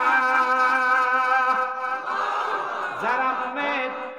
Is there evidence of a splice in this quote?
no; 0 cuts

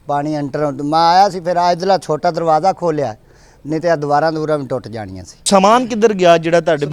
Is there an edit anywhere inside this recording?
yes; 1 cut; at 5.5 s

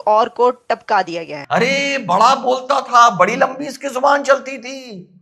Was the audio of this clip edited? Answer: yes; 1 cut; at 1.4 s

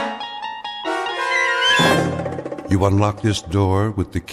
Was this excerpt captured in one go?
no; 1 cut; at 2.5 s

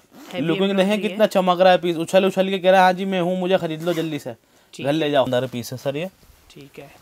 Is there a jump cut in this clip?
yes; 1 cut; at 5.3 s

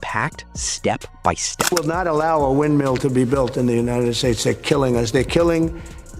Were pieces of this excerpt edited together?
yes; 1 cut; at 1.7 s

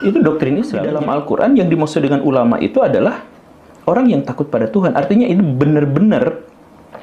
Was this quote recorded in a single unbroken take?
no; 1 cut; at 0.9 s

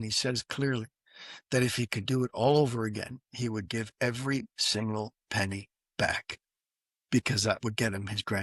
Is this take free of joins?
yes; 0 cuts

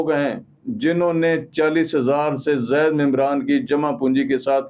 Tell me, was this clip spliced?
no; 0 cuts

